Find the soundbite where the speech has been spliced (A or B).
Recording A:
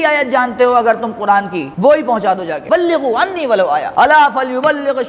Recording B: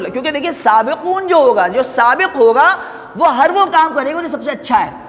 A